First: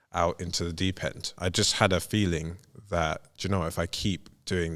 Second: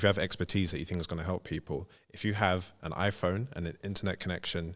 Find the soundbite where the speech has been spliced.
first; 1 cut; at 1.3 s

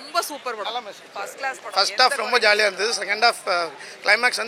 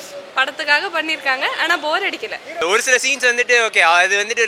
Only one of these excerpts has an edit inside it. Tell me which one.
second; 1 cut; at 2.6 s

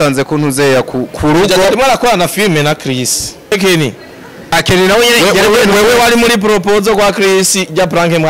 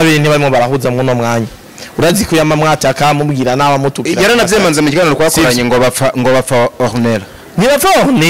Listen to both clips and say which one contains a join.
first; 1 cut; at 3.5 s

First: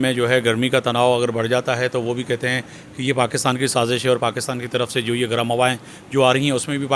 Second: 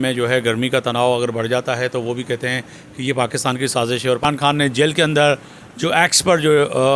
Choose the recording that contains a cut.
second; 1 cut; at 4.2 s

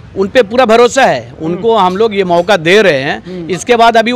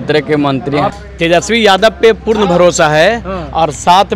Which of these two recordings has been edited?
second; 1 cut; at 0.9 s

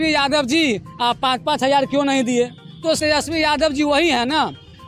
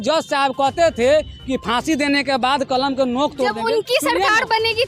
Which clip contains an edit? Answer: first; 1 cut; at 3.0 s

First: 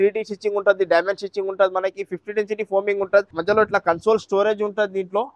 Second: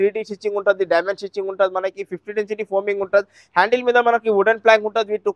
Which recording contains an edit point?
first; 1 cut; at 3.3 s

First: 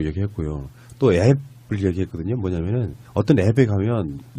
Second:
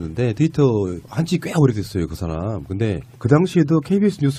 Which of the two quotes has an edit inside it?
second; 1 cut; at 3.2 s

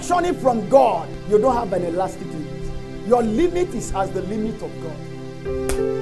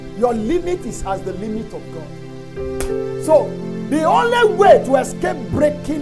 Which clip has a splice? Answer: first; 1 cut; at 1.1 s

